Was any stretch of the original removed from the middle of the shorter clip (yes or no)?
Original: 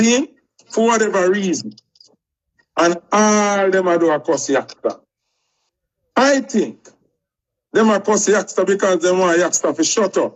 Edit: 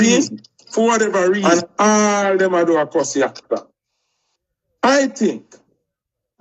yes